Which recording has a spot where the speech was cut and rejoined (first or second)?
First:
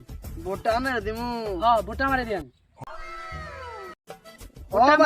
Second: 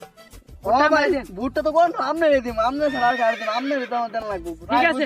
first